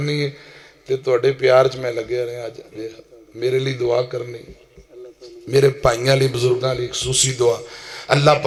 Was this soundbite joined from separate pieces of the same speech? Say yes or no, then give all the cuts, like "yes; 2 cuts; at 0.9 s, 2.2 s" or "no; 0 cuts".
no; 0 cuts